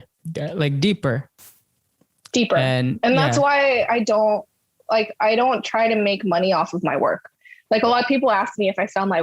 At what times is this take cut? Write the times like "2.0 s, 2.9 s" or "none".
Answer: none